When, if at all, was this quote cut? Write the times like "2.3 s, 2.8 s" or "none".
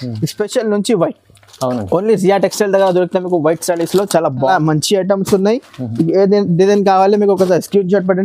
4.5 s